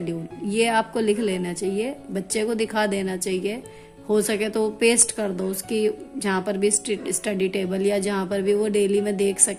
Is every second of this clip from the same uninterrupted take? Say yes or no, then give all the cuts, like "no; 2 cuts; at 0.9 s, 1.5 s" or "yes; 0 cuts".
yes; 0 cuts